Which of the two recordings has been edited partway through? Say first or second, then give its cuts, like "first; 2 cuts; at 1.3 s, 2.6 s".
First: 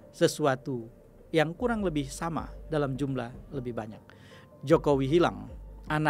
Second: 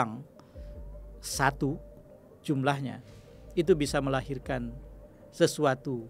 first; 1 cut; at 4.3 s